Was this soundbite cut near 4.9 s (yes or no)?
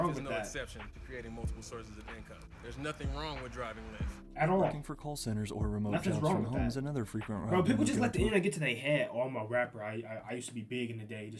no